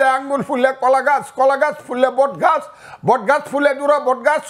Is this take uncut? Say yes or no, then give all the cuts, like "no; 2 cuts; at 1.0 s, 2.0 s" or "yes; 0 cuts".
yes; 0 cuts